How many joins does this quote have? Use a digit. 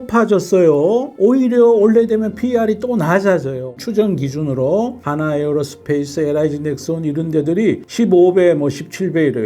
2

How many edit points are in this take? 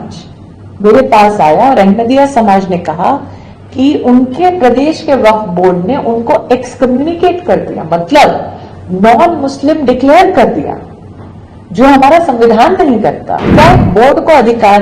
1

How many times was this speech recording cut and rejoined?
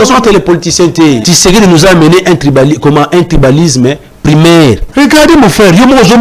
2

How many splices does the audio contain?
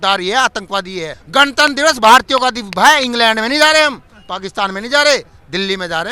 1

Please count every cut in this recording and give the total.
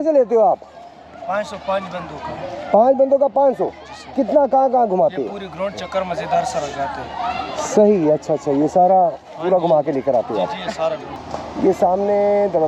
1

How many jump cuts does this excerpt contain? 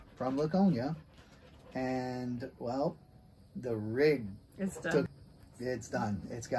1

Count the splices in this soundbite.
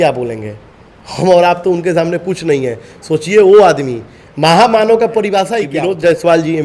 1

